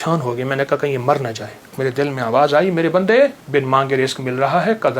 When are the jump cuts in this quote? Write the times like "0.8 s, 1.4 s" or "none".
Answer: 1.8 s, 3.4 s